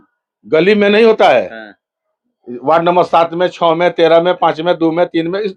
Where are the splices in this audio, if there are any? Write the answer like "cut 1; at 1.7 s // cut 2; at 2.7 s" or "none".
none